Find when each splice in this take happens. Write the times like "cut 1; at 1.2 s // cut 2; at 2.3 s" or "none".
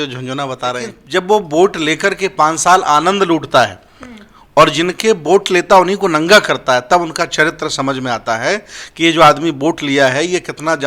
cut 1; at 1.0 s